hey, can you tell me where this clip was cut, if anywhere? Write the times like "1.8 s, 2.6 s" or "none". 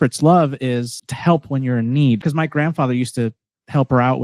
1.0 s, 2.2 s